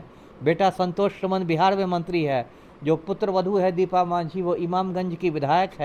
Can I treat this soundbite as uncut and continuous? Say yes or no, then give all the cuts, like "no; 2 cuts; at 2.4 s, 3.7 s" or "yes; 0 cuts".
yes; 0 cuts